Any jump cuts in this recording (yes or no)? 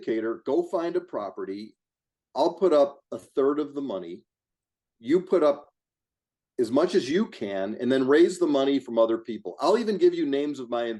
no